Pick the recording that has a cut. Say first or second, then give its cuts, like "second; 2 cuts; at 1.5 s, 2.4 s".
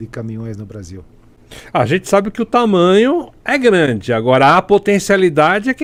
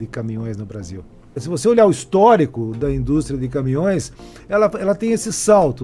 second; 1 cut; at 1.4 s